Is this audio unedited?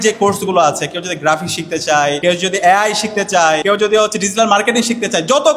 no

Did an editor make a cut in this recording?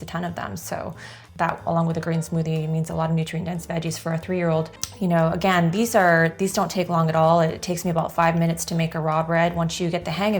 yes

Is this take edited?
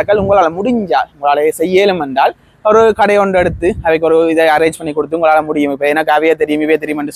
no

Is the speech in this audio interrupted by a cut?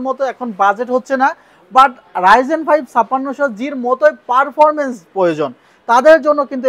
no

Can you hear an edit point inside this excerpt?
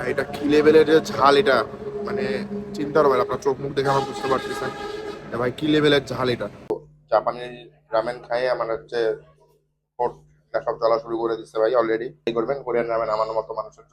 yes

